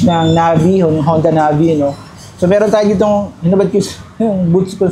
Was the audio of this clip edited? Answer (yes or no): no